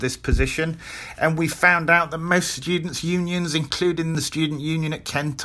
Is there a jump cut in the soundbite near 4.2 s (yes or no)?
yes